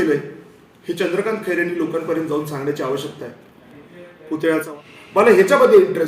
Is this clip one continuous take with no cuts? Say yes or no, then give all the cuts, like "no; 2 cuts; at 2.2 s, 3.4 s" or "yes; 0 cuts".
no; 1 cut; at 4.7 s